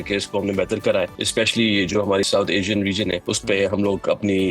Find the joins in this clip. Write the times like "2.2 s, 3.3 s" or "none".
1.2 s, 2.3 s, 3.3 s